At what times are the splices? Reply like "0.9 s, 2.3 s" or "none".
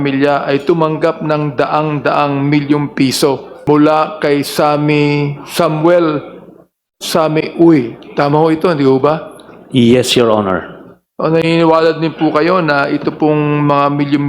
3.5 s

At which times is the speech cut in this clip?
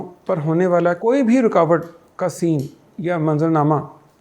1.0 s

